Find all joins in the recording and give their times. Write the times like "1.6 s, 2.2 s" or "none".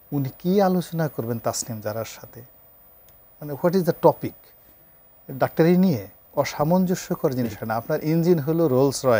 6.2 s